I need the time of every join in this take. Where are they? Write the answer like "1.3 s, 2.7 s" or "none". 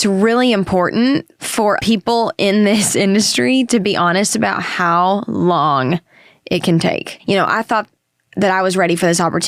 1.8 s, 7.1 s